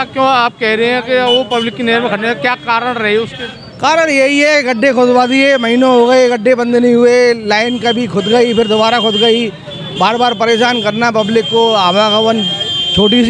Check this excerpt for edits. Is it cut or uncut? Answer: uncut